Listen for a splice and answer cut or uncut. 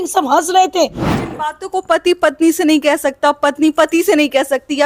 cut